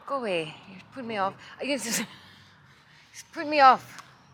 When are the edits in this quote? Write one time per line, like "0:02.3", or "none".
none